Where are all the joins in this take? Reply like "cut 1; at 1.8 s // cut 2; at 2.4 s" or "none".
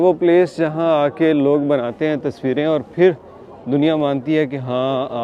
none